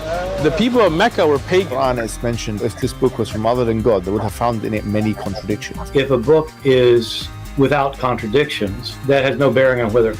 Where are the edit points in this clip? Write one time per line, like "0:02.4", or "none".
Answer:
0:06.1

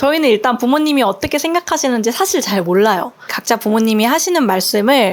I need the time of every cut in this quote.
0:03.4

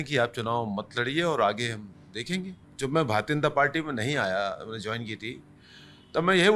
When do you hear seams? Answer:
0:02.6

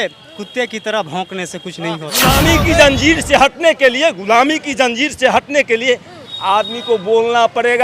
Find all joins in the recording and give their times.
0:02.1

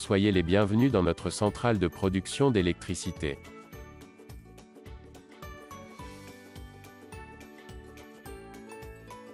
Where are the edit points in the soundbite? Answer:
0:04.0

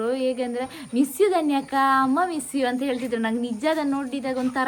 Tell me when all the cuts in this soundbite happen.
none

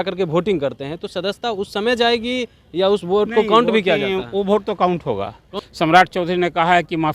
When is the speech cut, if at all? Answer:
0:05.5

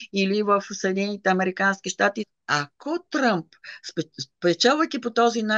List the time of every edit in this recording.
0:02.3

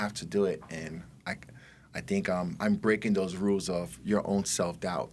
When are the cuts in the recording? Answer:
none

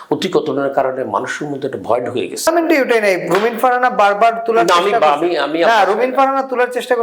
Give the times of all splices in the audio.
0:02.5

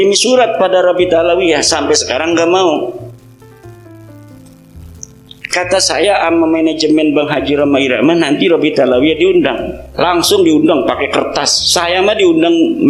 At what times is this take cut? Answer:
0:03.7
0:05.4

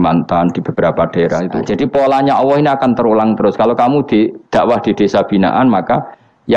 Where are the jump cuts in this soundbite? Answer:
0:01.6

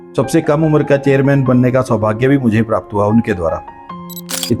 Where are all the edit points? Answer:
none

